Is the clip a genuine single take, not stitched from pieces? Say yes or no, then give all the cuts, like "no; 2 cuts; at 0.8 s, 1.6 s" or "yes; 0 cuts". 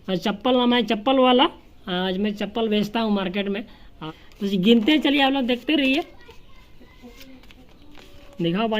no; 1 cut; at 3.9 s